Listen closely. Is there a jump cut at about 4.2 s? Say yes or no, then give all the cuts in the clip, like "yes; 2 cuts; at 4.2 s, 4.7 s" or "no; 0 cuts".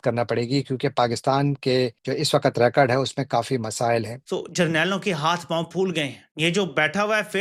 yes; 1 cut; at 4.2 s